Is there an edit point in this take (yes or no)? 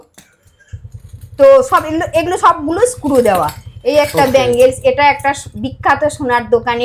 no